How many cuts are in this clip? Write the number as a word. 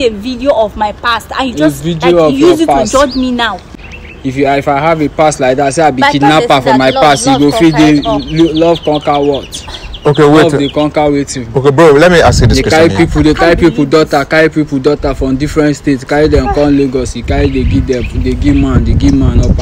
one